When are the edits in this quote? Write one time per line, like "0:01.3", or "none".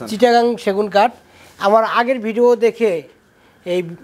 none